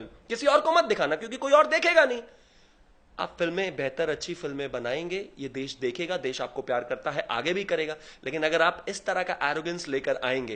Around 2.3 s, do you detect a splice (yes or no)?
no